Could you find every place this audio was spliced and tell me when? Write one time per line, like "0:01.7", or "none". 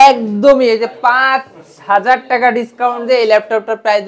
none